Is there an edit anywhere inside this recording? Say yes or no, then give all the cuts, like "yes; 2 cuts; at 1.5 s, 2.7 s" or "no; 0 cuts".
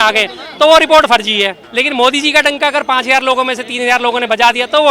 yes; 1 cut; at 1.6 s